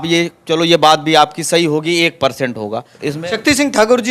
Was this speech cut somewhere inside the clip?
yes; 1 cut; at 2.9 s

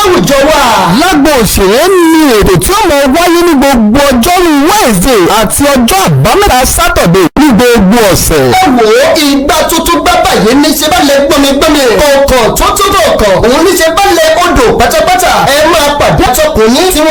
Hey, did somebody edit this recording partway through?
no; 0 cuts

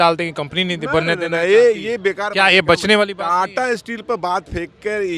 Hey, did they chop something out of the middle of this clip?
no; 0 cuts

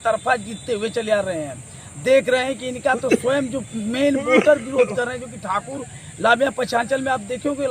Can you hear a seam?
no; 0 cuts

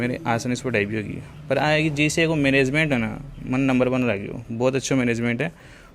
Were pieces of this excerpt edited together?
no; 0 cuts

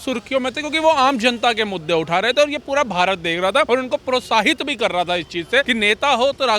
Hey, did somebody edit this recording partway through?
yes; 2 cuts; at 3.7 s, 5.7 s

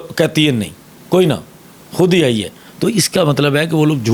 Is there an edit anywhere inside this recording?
no; 0 cuts

